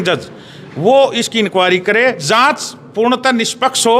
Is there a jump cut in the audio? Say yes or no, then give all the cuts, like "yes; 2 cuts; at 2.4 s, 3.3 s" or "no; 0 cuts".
yes; 1 cut; at 2.2 s